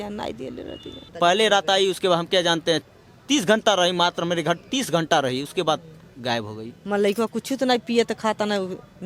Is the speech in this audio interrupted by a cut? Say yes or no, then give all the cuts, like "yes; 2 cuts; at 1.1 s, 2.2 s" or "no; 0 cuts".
yes; 2 cuts; at 1.0 s, 6.7 s